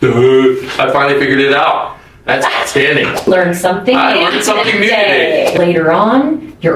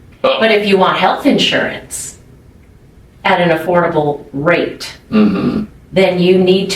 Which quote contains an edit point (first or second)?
first